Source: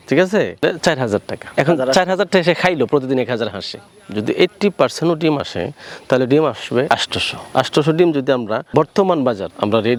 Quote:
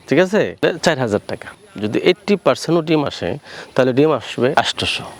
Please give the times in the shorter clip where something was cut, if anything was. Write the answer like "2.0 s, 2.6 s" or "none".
1.4 s